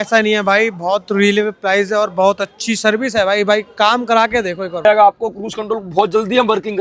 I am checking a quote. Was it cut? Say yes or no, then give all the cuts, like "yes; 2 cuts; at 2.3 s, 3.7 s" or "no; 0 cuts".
yes; 1 cut; at 4.8 s